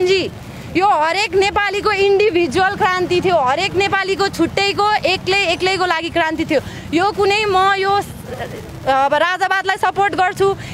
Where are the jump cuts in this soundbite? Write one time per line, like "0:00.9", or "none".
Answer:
none